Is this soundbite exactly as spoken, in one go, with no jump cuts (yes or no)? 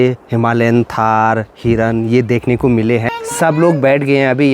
no